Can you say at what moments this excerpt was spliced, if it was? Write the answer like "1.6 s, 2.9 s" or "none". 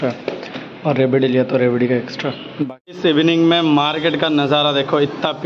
2.9 s